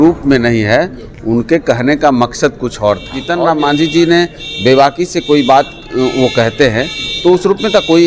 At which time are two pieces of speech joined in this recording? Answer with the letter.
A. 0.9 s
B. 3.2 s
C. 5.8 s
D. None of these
B